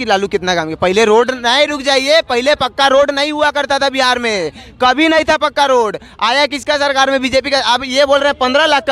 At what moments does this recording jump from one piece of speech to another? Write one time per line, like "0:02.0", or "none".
none